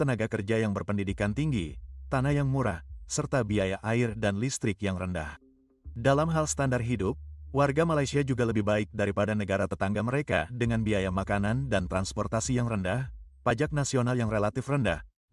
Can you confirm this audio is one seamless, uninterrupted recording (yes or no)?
yes